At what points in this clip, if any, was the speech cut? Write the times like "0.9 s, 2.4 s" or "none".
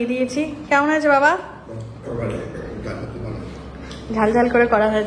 none